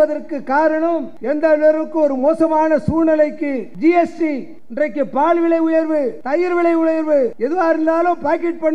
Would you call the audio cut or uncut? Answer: cut